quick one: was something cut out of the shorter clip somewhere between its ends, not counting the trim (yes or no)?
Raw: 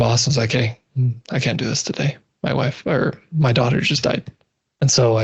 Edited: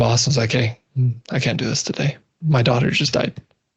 yes